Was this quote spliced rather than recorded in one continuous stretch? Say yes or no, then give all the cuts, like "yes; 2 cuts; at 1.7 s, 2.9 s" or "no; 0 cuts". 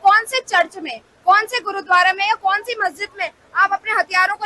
no; 0 cuts